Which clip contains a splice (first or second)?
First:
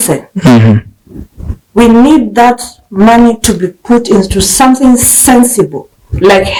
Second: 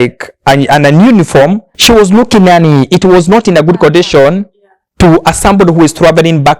second